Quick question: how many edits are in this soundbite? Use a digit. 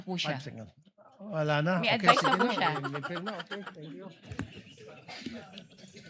0